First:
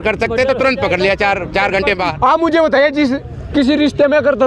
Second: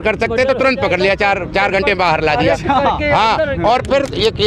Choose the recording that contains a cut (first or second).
first